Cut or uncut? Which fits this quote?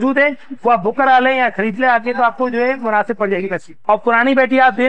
cut